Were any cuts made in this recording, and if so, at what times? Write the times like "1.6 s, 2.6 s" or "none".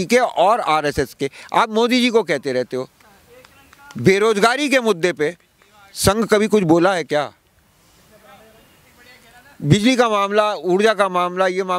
none